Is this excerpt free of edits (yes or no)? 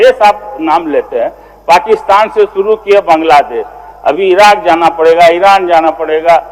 yes